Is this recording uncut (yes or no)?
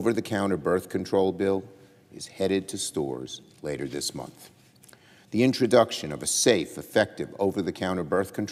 no